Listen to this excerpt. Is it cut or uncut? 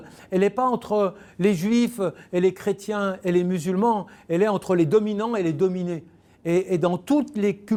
uncut